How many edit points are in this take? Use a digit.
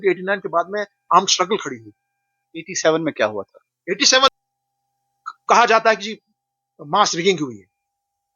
1